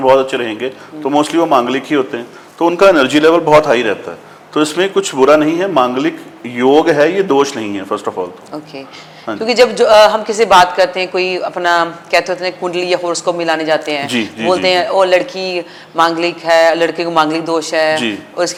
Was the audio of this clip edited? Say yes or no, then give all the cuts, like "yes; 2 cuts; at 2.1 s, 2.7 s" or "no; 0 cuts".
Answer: no; 0 cuts